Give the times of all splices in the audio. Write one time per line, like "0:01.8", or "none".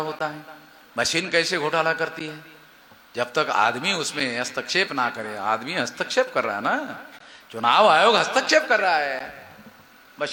none